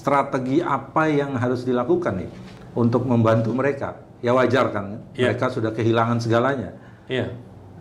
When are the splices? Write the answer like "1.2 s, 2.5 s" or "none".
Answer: none